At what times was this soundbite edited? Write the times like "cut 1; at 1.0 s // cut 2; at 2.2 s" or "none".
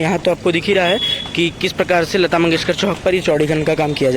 none